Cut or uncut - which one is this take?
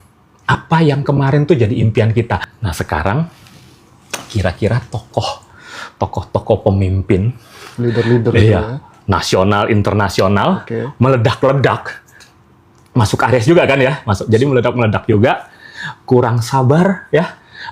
cut